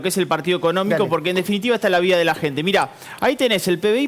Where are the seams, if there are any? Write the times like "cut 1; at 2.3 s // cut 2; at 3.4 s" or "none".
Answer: none